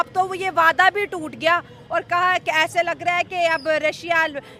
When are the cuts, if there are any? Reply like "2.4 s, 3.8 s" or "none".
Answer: none